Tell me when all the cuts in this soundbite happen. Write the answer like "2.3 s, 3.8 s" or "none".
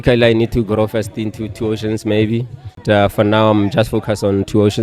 2.8 s